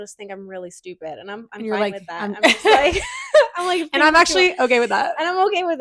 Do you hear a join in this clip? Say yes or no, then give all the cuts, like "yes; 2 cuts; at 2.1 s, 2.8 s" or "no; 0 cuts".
no; 0 cuts